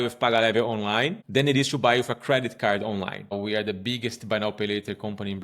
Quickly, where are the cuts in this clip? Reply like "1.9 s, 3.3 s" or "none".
1.2 s, 3.3 s